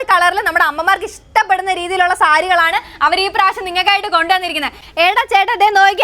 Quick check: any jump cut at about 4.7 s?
yes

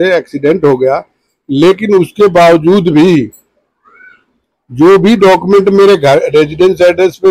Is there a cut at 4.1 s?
no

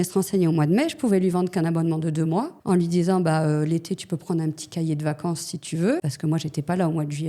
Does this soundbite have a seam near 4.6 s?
no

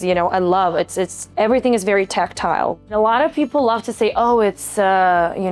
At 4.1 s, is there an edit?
no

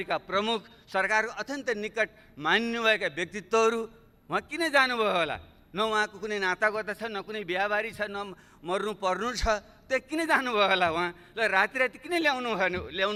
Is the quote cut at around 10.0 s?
no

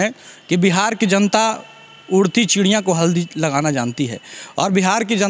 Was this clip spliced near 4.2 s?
no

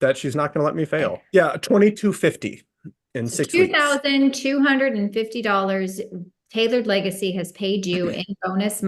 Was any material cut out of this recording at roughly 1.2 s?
yes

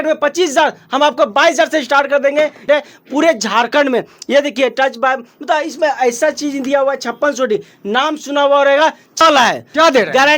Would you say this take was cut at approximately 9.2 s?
yes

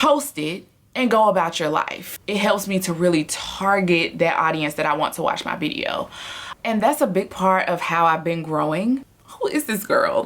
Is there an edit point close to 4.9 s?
no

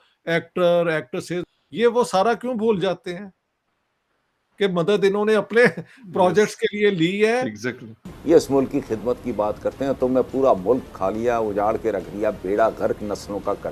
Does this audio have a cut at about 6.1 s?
no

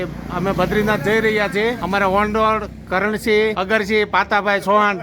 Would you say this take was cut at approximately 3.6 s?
yes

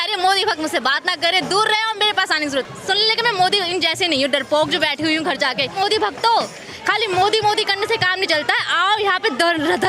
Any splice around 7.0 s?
no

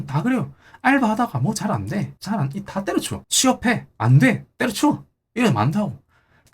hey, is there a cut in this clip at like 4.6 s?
no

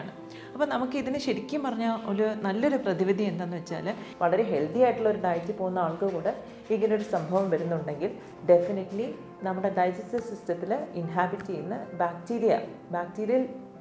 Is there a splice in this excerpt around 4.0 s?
yes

